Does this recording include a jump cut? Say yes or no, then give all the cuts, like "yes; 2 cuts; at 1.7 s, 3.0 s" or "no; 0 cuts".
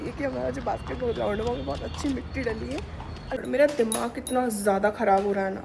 yes; 1 cut; at 3.3 s